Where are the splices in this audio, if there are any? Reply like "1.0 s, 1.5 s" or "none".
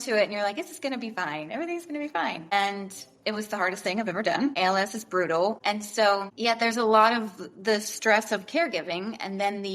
5.6 s